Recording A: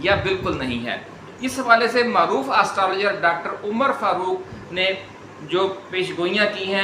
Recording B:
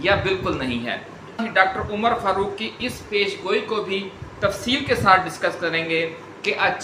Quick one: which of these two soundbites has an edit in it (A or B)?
B